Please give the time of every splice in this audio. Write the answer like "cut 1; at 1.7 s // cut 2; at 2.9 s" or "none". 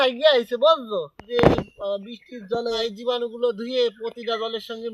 cut 1; at 1.2 s // cut 2; at 2.8 s